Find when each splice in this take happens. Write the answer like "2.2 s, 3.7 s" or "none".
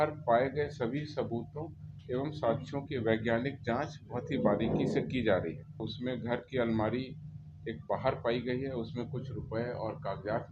5.9 s